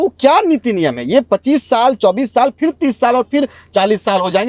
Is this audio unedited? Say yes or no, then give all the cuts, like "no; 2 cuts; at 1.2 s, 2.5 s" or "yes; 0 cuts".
yes; 0 cuts